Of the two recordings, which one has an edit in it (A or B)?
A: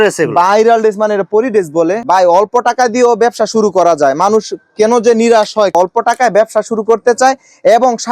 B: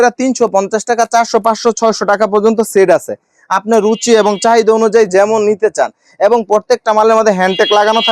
A